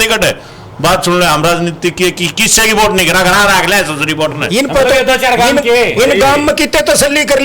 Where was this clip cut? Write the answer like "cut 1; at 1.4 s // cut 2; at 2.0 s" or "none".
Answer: cut 1; at 4.4 s